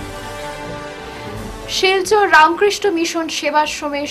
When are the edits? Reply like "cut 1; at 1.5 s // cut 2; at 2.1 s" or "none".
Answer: none